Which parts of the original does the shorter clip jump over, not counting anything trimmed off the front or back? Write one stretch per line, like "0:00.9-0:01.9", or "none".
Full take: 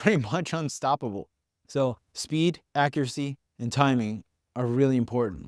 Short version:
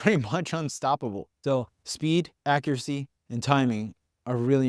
0:01.3-0:01.6